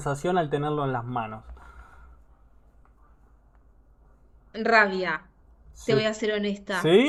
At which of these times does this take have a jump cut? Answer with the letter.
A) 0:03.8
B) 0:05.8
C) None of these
C